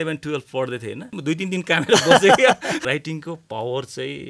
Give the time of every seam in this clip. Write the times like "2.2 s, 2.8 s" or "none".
1.1 s, 2.8 s